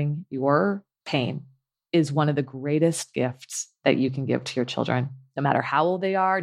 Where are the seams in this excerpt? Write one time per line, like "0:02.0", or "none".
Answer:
0:00.9